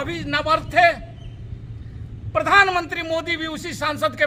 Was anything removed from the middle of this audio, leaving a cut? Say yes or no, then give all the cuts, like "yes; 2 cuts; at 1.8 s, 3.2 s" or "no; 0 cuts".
no; 0 cuts